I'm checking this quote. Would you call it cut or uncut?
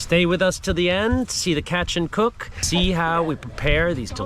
cut